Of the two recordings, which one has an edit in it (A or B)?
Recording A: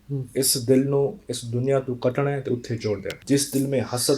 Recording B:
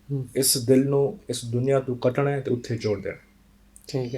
A